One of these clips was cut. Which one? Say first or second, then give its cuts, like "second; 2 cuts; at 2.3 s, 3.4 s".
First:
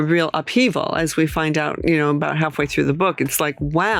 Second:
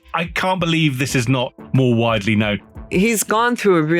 second; 2 cuts; at 1.6 s, 2.7 s